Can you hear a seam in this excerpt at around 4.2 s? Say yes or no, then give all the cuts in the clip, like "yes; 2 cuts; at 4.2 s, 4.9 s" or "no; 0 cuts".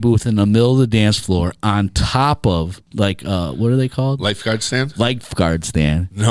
no; 1 cut; at 2.8 s